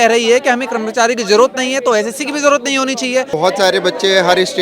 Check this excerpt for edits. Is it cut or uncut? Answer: cut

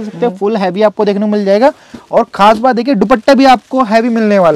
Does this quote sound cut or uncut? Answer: uncut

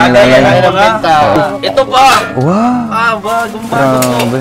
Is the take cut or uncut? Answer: cut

